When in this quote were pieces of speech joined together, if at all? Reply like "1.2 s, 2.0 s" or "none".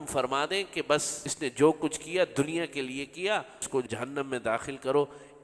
1.2 s, 3.6 s